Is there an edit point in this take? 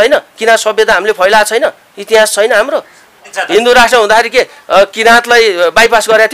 yes; 1 cut; at 3.3 s

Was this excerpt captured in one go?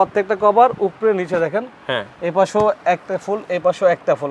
yes; 0 cuts

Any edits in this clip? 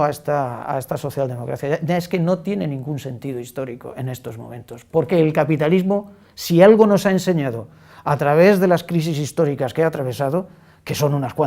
yes; 1 cut; at 1.8 s

